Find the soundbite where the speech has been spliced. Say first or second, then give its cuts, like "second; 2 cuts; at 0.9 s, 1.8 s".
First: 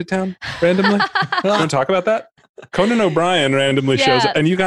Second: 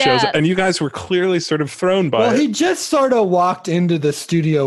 second; 1 cut; at 2.2 s